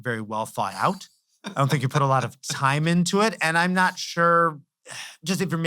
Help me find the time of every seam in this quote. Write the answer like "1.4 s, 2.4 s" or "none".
none